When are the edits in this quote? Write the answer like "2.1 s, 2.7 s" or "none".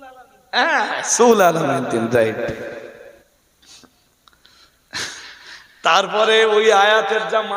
3.3 s

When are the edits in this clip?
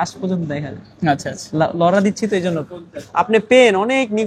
none

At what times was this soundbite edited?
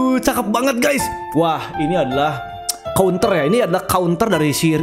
none

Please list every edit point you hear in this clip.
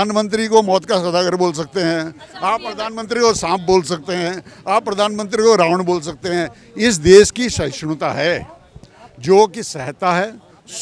none

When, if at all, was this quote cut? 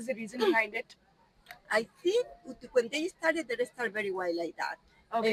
none

